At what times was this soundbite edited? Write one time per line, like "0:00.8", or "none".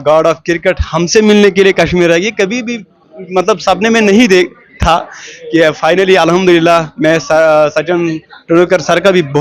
none